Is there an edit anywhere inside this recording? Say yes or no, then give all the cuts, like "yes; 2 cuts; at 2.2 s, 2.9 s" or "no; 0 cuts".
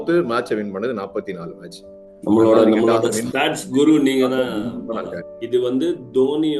yes; 1 cut; at 5.3 s